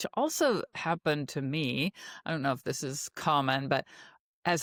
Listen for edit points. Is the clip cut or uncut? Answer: uncut